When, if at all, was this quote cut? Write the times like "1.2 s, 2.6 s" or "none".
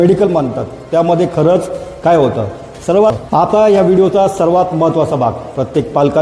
3.1 s